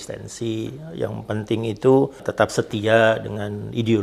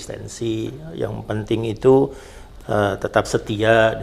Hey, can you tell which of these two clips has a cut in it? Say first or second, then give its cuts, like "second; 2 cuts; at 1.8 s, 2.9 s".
first; 1 cut; at 2.2 s